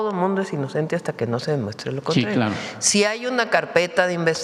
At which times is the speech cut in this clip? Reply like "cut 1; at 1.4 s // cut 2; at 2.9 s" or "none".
none